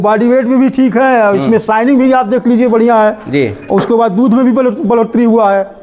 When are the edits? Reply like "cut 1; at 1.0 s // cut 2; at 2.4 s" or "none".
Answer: none